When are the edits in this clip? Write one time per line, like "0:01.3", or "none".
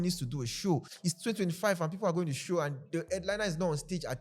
0:00.9